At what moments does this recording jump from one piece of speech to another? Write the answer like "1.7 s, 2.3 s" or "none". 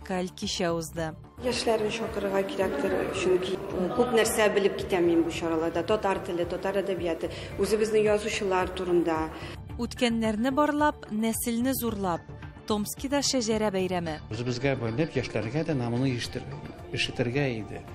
none